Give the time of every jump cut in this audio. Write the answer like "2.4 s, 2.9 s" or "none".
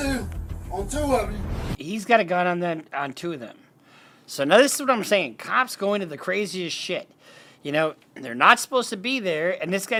none